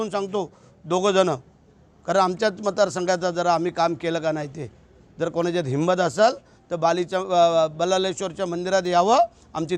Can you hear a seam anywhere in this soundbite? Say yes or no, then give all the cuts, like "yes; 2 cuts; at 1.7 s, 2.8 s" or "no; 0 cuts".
no; 0 cuts